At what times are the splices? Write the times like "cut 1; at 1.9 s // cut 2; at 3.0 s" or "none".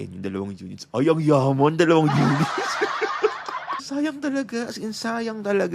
cut 1; at 3.8 s